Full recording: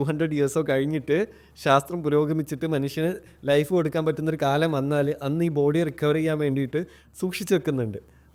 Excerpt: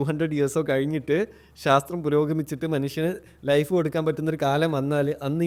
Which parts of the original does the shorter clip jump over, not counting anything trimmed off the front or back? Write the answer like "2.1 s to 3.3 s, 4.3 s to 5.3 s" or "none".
none